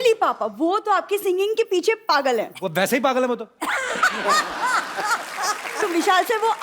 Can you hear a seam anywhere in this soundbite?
yes; 2 cuts; at 2.5 s, 5.8 s

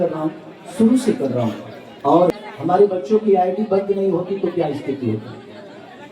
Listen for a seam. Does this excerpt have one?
yes; 1 cut; at 2.3 s

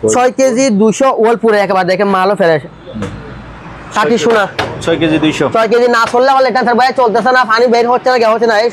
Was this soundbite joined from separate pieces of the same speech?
no; 0 cuts

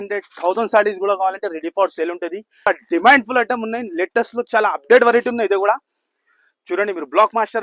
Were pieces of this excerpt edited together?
yes; 1 cut; at 2.7 s

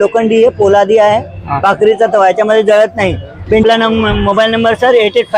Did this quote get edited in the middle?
no; 0 cuts

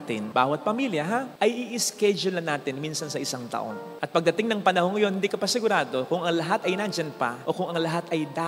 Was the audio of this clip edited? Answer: no; 0 cuts

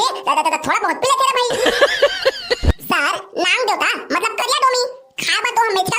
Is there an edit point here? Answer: yes; 1 cut; at 2.7 s

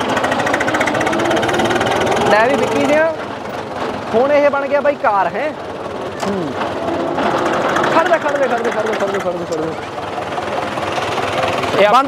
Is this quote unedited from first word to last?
yes; 0 cuts

